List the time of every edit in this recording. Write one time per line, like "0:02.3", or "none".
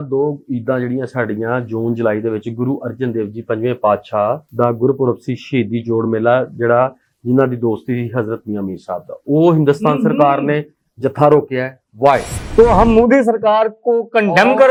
none